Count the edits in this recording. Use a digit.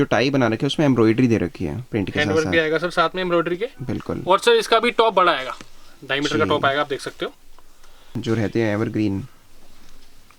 1